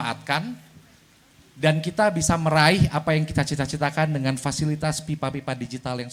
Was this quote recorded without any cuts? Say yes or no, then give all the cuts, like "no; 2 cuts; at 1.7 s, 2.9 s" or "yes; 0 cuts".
yes; 0 cuts